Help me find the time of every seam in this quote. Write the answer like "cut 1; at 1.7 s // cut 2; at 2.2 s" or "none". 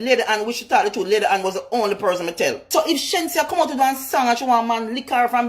cut 1; at 2.6 s